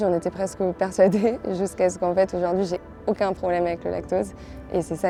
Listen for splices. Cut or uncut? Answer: uncut